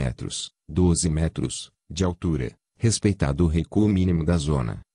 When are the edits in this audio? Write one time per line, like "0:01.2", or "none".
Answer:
0:02.6

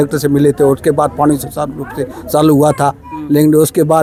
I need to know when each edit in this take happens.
none

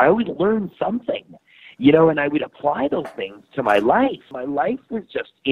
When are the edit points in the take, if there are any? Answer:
0:04.3

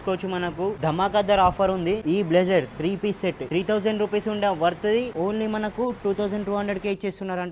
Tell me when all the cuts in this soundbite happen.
0:00.8
0:02.0
0:03.4
0:05.1

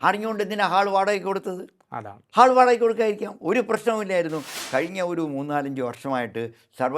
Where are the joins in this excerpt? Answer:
0:04.5

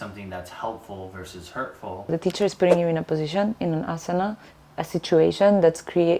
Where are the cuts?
0:02.1

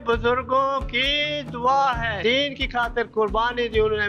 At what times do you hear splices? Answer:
0:02.2

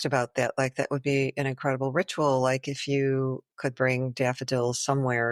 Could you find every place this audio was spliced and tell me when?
none

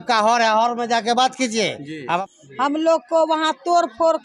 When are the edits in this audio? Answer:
0:02.2

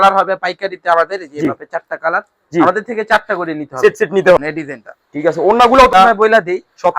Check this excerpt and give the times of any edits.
0:04.4
0:05.9

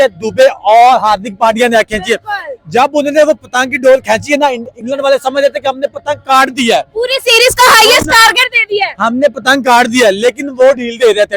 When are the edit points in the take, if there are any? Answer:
none

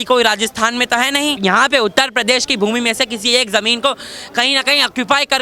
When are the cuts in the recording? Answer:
0:01.4

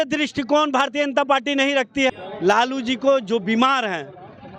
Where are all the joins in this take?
0:02.1

